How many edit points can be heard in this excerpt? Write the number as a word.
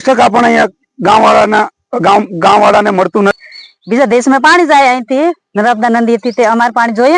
one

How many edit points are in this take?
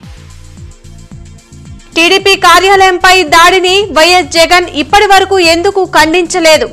zero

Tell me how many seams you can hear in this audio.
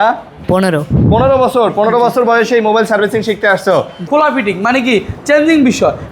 one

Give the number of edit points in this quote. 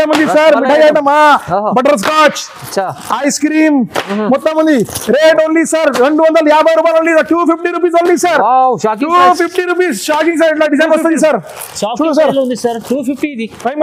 zero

